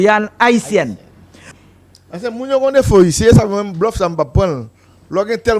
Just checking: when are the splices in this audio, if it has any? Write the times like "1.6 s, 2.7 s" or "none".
1.5 s